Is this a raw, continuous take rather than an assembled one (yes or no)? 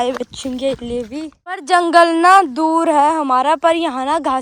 no